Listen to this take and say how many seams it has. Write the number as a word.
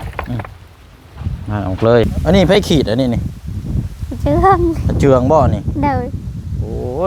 one